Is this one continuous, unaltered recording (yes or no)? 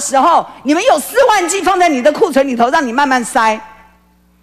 yes